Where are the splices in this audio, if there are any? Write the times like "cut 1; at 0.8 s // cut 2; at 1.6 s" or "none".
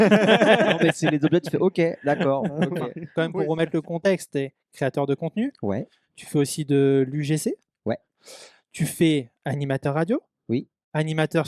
cut 1; at 3.0 s